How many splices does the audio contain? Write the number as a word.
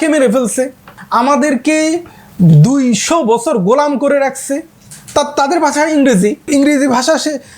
two